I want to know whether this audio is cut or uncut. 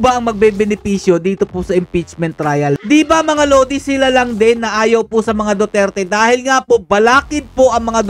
cut